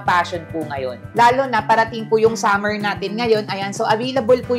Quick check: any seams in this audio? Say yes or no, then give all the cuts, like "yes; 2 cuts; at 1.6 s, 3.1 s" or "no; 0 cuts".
yes; 1 cut; at 1.0 s